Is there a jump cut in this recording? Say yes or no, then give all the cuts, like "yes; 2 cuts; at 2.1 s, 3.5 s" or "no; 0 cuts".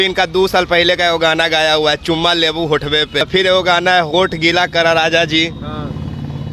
no; 0 cuts